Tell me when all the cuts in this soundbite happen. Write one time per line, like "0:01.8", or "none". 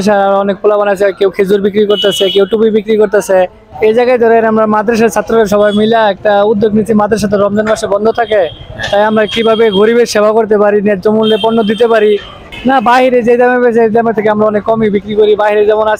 0:03.6
0:12.4